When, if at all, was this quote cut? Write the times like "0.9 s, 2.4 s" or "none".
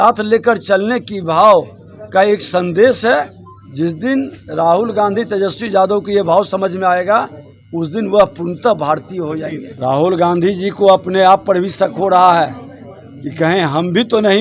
9.7 s